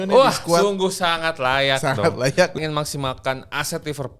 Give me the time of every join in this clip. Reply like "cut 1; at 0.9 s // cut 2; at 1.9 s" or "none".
cut 1; at 2.6 s